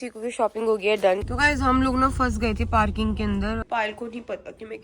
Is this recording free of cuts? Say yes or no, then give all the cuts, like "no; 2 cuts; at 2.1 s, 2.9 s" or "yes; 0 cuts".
no; 2 cuts; at 1.2 s, 3.6 s